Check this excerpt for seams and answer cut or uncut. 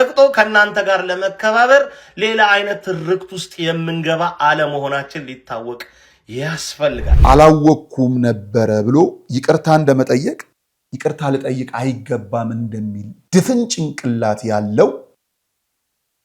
cut